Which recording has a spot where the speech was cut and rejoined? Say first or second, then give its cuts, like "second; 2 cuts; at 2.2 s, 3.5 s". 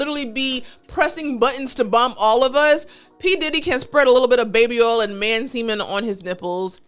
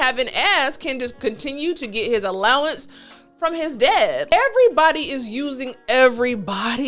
second; 1 cut; at 4.2 s